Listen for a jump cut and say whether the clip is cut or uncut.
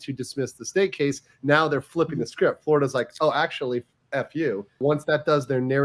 cut